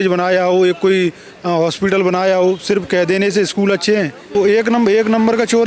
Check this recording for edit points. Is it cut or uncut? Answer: cut